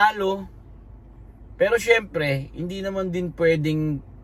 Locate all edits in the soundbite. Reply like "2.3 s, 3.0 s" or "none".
none